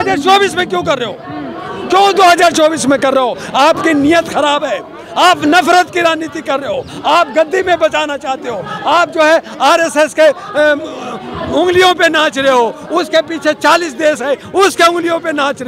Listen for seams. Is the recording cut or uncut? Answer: uncut